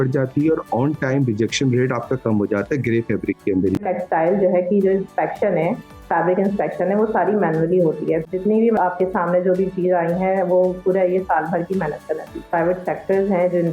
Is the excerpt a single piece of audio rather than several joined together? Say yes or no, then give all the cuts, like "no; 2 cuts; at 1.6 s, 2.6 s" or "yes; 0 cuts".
no; 3 cuts; at 3.8 s, 8.7 s, 12.4 s